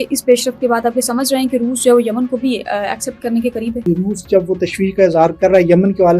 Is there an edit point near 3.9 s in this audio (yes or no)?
yes